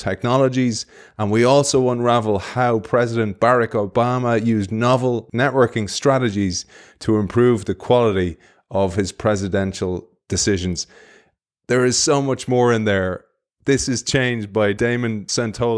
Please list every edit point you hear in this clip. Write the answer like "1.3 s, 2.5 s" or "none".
14.9 s